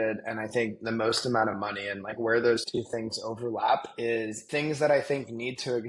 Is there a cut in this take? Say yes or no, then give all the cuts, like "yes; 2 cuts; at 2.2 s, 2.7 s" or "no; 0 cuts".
yes; 1 cut; at 4.4 s